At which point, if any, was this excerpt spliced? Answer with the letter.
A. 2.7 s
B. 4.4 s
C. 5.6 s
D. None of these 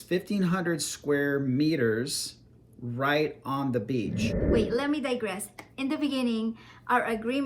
B